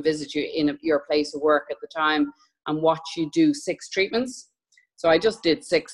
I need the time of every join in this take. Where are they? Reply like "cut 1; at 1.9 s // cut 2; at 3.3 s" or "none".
none